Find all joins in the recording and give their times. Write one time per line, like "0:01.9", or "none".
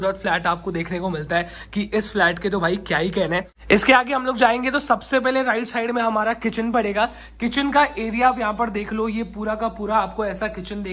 none